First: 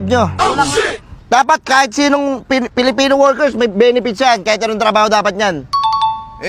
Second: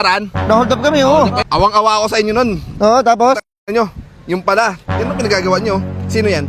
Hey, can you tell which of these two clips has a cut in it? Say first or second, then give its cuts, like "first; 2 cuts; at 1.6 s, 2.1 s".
second; 1 cut; at 1.4 s